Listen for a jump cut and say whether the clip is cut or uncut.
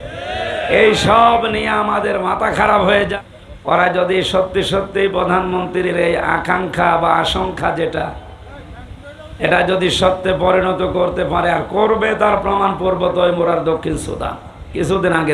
cut